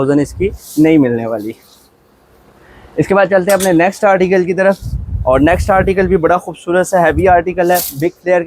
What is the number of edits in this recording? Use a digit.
0